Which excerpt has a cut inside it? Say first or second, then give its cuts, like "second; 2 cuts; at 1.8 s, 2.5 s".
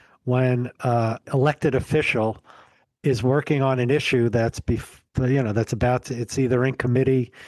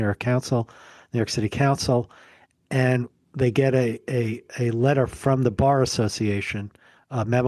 first; 1 cut; at 1.2 s